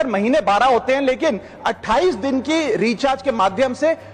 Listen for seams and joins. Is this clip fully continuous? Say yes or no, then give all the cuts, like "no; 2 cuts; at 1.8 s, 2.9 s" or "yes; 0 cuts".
yes; 0 cuts